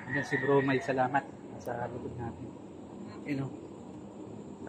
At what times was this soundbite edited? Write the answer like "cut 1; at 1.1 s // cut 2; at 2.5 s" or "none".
none

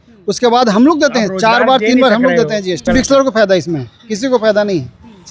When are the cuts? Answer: cut 1; at 2.9 s

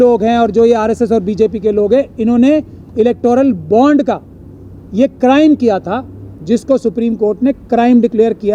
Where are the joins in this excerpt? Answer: none

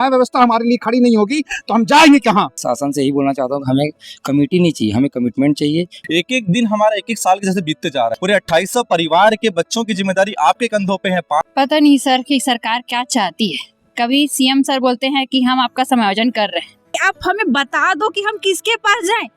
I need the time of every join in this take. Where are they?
cut 1; at 2.6 s // cut 2; at 6.0 s // cut 3; at 8.2 s // cut 4; at 11.4 s // cut 5; at 16.9 s

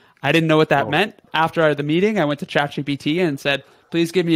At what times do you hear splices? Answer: cut 1; at 1.2 s

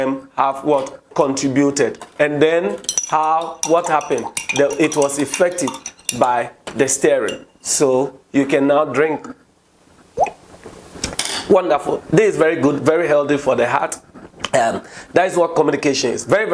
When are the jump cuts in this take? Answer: none

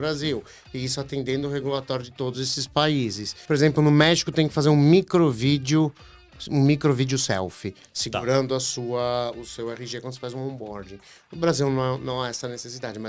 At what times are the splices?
cut 1; at 3.3 s

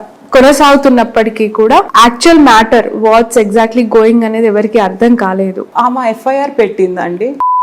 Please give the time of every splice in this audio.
cut 1; at 1.9 s // cut 2; at 5.7 s

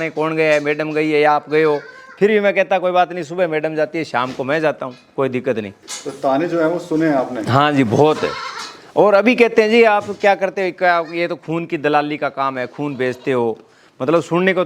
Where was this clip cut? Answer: none

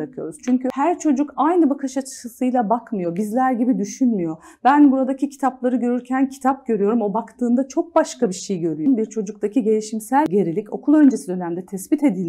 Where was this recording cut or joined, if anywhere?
cut 1; at 0.7 s // cut 2; at 8.8 s // cut 3; at 10.2 s

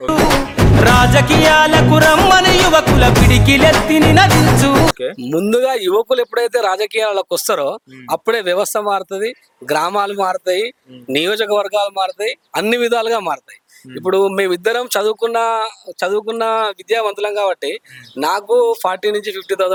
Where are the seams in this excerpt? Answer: none

